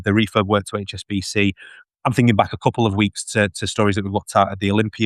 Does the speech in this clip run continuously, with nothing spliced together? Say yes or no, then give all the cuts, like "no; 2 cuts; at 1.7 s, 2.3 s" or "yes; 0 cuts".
yes; 0 cuts